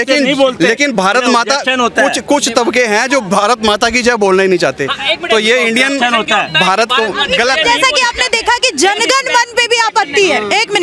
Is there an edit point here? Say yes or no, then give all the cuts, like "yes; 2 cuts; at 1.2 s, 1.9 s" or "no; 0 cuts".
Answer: no; 0 cuts